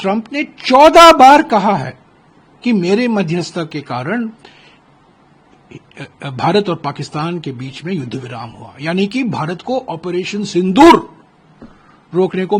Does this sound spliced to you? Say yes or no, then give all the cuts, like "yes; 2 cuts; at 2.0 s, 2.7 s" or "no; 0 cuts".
no; 0 cuts